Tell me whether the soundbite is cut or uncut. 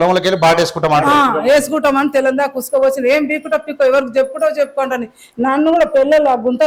uncut